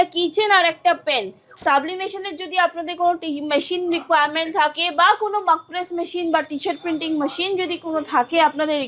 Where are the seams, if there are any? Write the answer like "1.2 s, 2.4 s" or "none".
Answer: 1.4 s